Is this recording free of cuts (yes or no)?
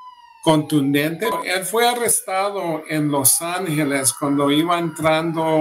no